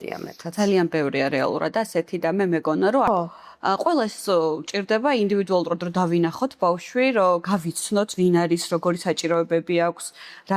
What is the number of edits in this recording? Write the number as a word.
one